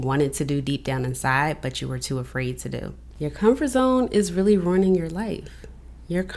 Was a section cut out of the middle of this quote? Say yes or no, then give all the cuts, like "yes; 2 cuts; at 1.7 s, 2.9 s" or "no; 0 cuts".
yes; 1 cut; at 3.0 s